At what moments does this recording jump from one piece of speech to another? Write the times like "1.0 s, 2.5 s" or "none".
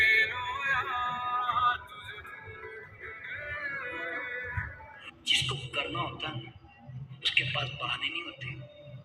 5.1 s

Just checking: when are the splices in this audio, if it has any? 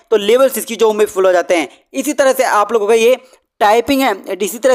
none

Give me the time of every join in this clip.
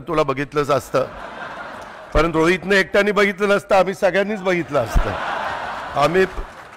none

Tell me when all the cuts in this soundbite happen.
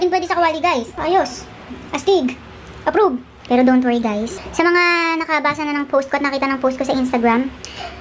0.9 s, 3.3 s

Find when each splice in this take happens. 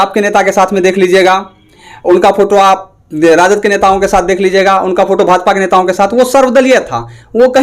none

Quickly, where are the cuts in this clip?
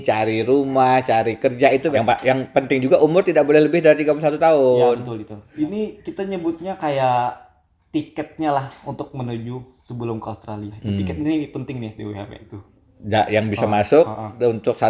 1.9 s, 5.4 s, 12.6 s

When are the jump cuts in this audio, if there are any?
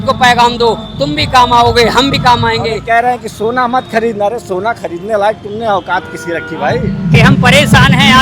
2.8 s, 6.9 s

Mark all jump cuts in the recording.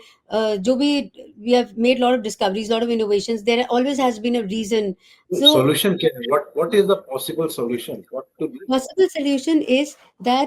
5.1 s

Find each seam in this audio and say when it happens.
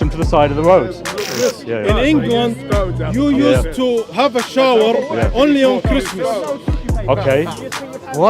1.3 s

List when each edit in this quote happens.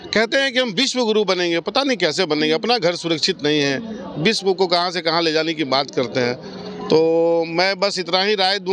none

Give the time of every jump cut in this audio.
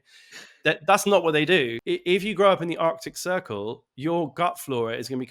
1.8 s

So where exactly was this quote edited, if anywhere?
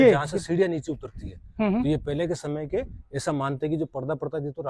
none

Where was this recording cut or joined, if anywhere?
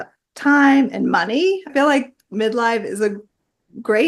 1.7 s

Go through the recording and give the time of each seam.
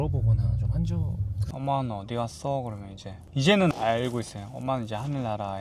1.4 s

